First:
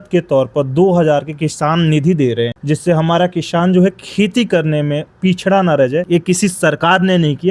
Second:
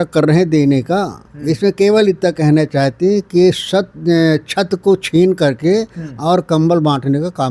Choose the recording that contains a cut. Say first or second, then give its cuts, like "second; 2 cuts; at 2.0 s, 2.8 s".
first; 2 cuts; at 2.6 s, 6.1 s